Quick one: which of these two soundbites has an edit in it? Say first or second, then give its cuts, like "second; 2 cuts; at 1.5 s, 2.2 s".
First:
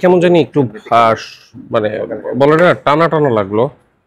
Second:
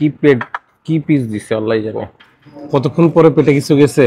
second; 1 cut; at 2.2 s